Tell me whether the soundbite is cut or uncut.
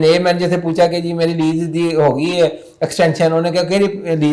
uncut